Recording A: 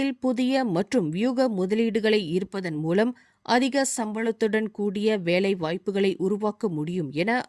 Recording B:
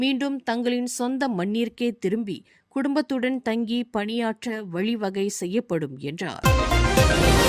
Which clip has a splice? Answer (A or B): B